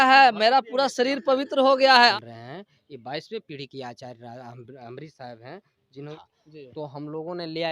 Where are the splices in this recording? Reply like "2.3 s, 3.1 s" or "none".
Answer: 2.1 s, 6.1 s